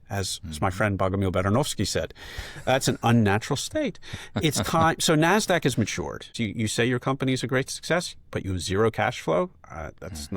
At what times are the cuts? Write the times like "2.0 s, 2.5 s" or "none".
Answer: 6.3 s